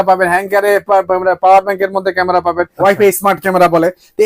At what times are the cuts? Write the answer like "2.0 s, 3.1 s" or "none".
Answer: 2.7 s